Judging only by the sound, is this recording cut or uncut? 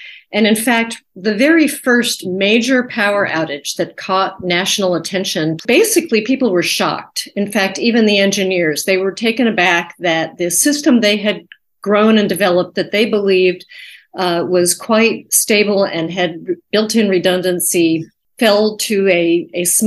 cut